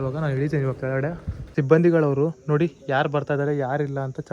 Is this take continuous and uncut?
no; 1 cut; at 1.3 s

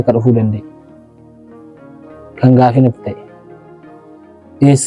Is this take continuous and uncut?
yes; 0 cuts

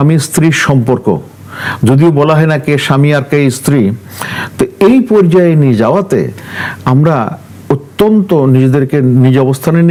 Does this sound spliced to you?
no; 0 cuts

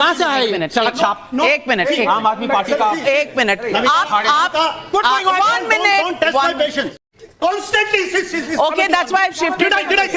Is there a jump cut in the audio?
yes; 1 cut; at 6.9 s

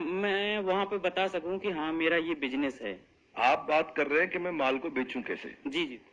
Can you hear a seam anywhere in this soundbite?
no; 0 cuts

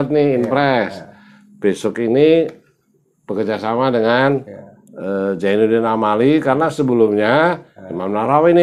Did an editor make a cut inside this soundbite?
no; 0 cuts

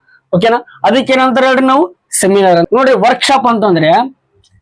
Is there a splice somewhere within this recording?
yes; 1 cut; at 2.7 s

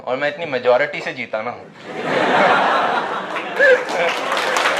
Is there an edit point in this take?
no; 0 cuts

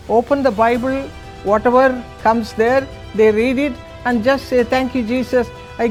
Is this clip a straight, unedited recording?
yes; 0 cuts

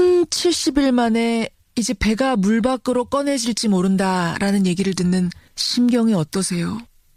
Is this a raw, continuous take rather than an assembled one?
yes; 0 cuts

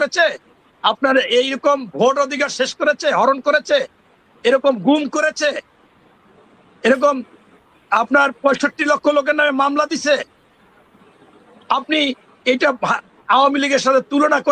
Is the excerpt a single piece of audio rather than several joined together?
yes; 0 cuts

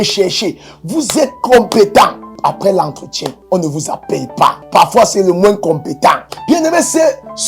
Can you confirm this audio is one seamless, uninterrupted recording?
no; 4 cuts; at 2.3 s, 3.4 s, 4.6 s, 6.3 s

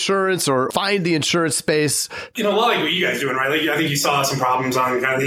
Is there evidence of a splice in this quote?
yes; 1 cut; at 2.3 s

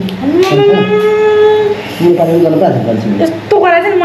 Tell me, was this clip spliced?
no; 0 cuts

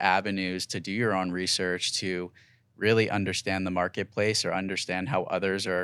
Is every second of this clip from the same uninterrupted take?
yes; 0 cuts

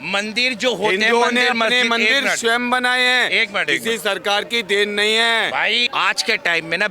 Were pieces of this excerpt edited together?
yes; 1 cut; at 5.8 s

